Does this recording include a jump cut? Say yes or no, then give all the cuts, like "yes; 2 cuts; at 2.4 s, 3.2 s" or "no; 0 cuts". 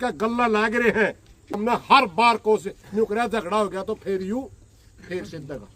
yes; 1 cut; at 1.6 s